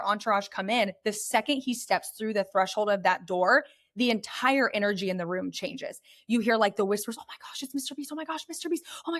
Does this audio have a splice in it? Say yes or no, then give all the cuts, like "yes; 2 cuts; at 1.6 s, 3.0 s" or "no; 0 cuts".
no; 0 cuts